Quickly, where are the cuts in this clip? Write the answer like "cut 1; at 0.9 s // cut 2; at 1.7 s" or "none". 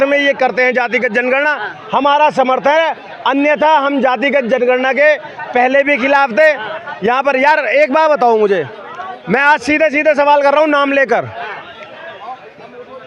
none